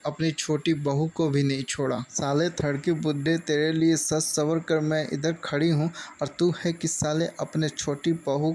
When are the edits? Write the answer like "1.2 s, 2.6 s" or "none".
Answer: 2.1 s